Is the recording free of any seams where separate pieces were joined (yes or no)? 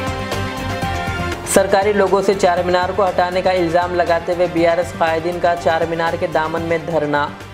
no